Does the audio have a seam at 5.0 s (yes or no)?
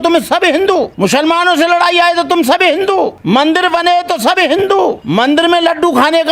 yes